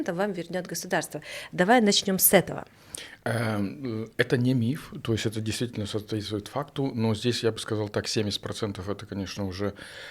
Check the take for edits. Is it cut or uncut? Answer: uncut